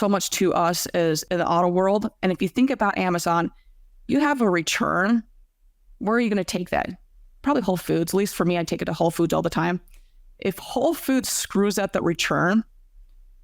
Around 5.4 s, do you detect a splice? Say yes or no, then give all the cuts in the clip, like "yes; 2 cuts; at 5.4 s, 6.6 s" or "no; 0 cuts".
no; 1 cut; at 1.2 s